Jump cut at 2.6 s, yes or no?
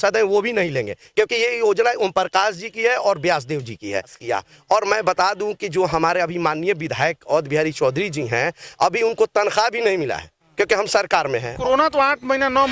no